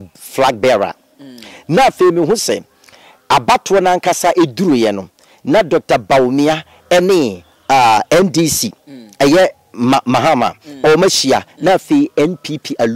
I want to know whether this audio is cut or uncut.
uncut